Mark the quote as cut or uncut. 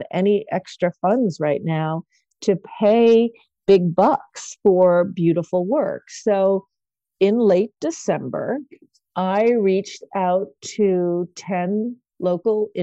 uncut